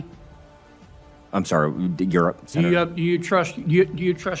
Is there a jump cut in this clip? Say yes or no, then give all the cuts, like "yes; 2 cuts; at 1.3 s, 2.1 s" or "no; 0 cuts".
no; 0 cuts